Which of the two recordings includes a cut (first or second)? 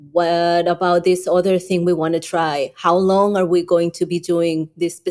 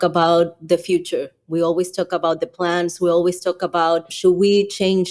second